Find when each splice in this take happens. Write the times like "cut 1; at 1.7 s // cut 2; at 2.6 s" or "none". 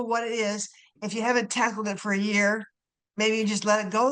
none